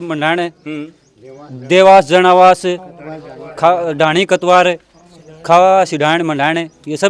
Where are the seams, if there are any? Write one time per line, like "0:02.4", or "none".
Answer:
none